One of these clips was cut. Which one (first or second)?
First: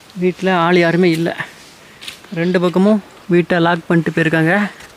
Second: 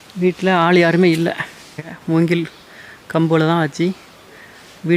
second